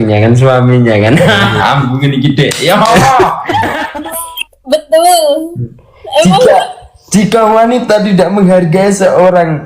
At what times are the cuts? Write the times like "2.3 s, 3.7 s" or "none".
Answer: 3.9 s